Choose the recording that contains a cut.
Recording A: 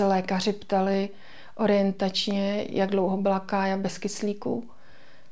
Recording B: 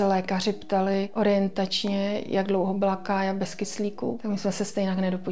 B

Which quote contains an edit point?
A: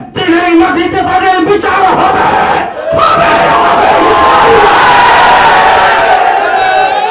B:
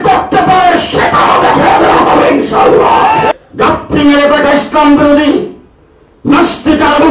B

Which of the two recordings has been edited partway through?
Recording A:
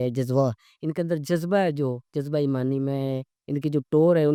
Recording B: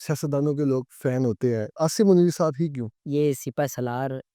B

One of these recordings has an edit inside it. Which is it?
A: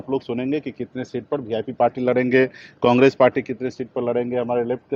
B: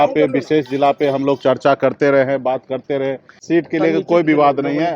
B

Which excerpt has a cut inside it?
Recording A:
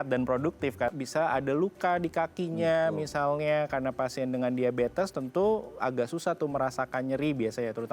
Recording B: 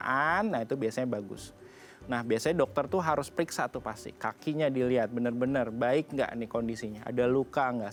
A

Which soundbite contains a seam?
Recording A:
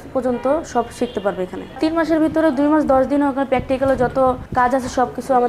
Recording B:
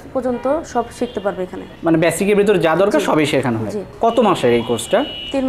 A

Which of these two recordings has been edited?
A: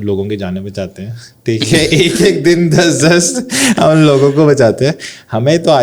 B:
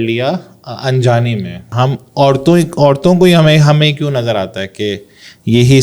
B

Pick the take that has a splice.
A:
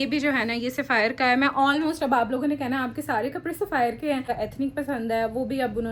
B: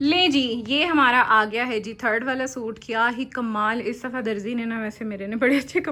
A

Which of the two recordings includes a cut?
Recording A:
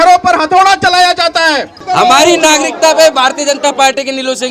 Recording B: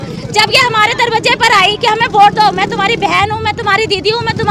A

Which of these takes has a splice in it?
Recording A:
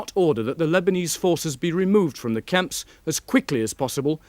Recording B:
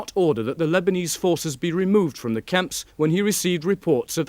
B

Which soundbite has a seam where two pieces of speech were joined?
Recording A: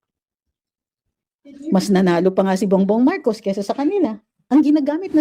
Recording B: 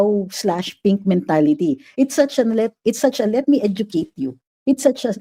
A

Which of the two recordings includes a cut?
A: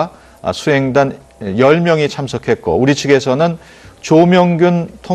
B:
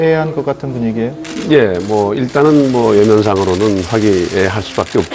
B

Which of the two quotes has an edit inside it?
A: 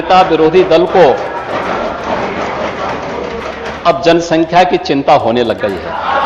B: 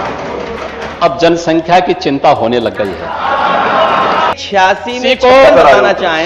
B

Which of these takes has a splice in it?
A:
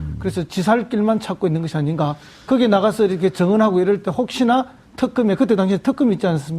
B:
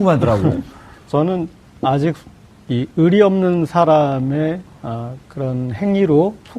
B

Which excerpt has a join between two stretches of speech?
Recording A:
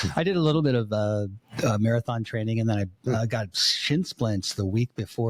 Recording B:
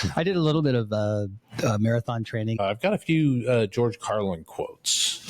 B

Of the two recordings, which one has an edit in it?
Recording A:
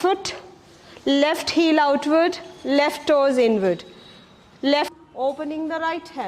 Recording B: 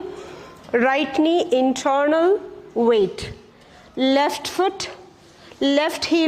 A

